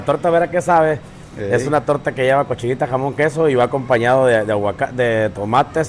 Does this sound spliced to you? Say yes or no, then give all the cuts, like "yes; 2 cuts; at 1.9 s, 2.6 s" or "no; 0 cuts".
no; 0 cuts